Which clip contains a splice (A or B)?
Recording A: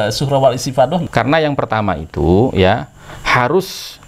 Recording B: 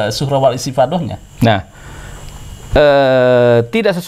A